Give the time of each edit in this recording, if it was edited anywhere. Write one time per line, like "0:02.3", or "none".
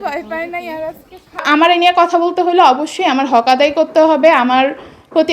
0:01.3